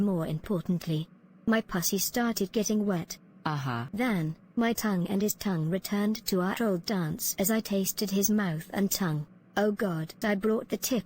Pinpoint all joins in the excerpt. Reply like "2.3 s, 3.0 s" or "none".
3.8 s, 10.1 s